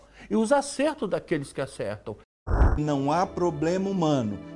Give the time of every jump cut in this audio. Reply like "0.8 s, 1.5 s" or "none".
2.5 s

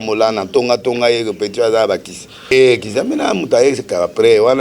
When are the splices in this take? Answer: 2.5 s

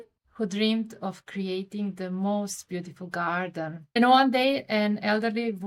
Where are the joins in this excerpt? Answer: 3.8 s

